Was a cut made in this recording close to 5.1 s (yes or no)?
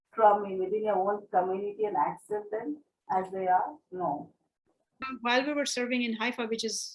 yes